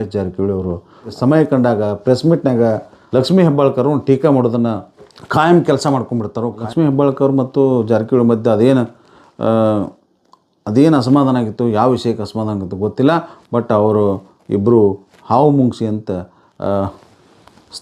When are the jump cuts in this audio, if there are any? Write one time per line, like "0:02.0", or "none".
none